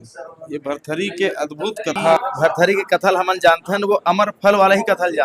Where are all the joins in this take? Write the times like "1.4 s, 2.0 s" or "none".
2.2 s